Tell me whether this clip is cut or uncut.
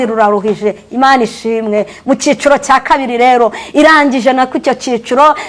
uncut